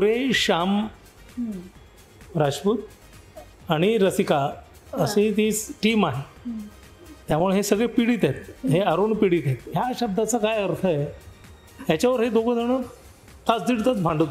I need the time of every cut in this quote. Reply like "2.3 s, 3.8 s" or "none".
9.6 s